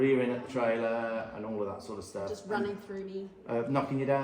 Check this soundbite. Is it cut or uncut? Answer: uncut